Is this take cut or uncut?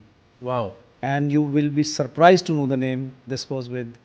uncut